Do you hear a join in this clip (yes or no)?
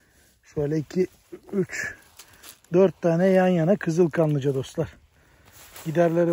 no